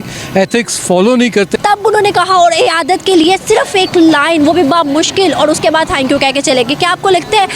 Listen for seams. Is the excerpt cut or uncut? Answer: cut